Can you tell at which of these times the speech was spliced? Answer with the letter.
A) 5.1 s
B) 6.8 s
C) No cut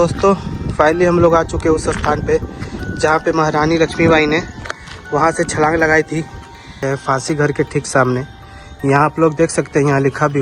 B